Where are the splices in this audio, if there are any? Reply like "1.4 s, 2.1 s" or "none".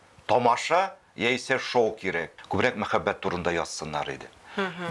2.3 s